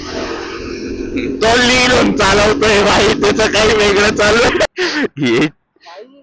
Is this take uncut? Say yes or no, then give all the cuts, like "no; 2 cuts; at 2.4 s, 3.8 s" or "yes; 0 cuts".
no; 1 cut; at 4.7 s